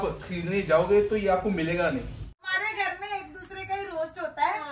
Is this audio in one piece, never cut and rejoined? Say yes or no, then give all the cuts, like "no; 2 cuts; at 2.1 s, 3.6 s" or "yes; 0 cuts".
no; 1 cut; at 2.3 s